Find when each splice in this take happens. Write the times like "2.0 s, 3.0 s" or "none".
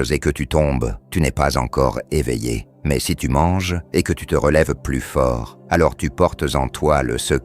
1.0 s, 2.7 s, 3.8 s, 5.5 s